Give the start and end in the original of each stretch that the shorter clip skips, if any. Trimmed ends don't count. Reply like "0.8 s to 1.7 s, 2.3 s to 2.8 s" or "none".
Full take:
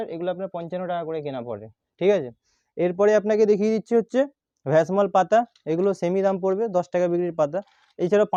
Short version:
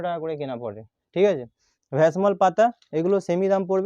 2.6 s to 4.5 s